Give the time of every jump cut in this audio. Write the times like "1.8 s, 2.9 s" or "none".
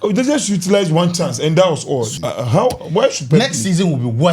2.1 s